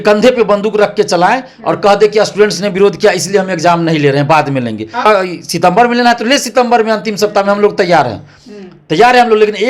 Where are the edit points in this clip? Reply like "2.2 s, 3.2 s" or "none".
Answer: 5.1 s